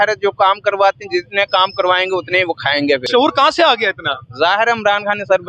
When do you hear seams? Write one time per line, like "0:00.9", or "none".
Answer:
0:03.1